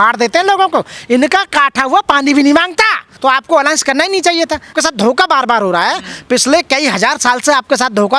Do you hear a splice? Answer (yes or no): yes